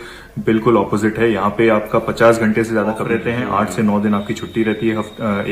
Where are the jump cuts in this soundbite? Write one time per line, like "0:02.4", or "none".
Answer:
0:03.1